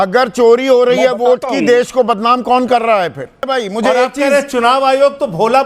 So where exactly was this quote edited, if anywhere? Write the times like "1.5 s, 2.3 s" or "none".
3.5 s